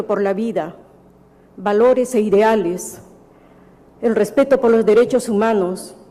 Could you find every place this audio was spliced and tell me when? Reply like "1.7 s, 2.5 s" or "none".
none